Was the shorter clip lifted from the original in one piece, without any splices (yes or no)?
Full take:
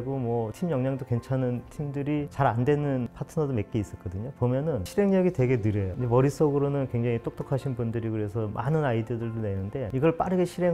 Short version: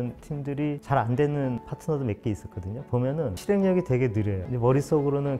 yes